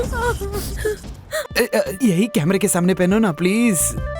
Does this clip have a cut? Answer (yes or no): yes